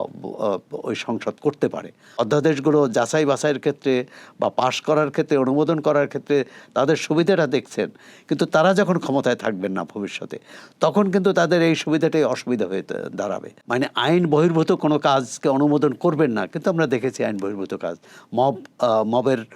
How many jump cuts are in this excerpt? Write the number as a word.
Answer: two